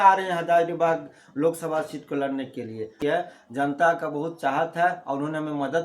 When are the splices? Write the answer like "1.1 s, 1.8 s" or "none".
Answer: 2.9 s

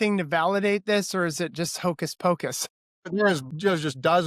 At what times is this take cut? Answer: 2.9 s

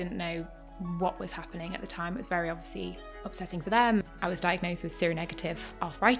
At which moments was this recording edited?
4.0 s

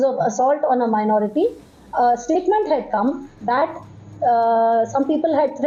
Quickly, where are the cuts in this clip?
none

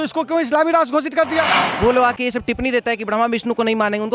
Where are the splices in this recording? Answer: 1.6 s

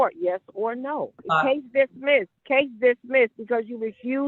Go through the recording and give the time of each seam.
1.2 s, 2.4 s

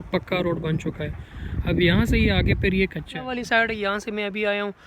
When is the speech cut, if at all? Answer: 3.2 s

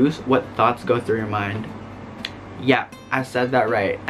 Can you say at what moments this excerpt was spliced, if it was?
none

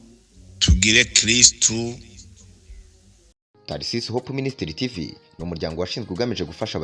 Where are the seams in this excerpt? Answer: 3.5 s

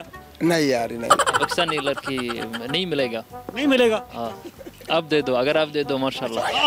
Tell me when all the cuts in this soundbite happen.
1.3 s

